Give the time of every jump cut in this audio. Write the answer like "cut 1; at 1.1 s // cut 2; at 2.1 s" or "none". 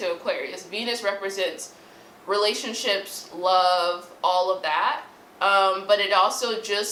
none